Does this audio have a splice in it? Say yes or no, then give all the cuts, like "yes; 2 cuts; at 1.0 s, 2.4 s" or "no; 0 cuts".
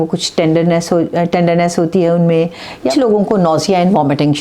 yes; 1 cut; at 2.9 s